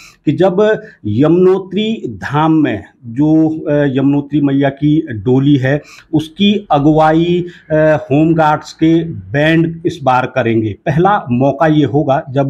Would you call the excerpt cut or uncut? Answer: uncut